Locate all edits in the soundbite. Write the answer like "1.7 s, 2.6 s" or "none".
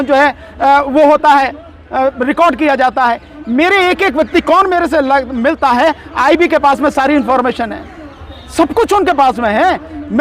none